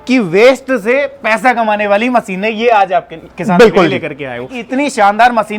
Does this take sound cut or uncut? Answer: cut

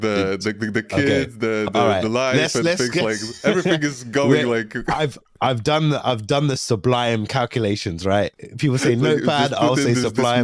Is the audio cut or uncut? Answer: uncut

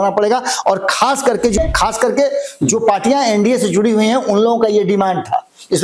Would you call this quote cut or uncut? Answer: cut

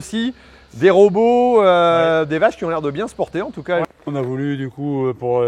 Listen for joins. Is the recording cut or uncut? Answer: cut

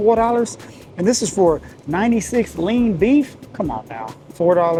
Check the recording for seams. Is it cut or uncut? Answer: uncut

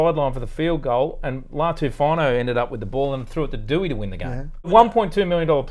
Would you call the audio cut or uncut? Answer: cut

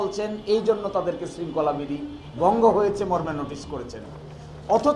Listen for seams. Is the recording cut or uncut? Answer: uncut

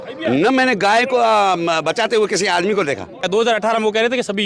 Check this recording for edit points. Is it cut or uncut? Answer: cut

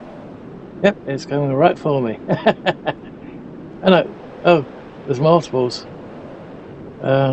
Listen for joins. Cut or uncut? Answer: uncut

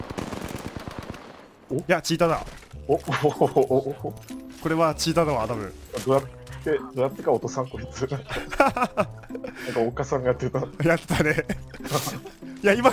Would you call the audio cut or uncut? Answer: uncut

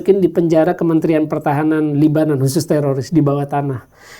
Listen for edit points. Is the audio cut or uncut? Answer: uncut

